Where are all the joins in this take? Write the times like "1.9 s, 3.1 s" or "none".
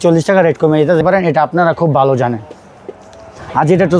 1.0 s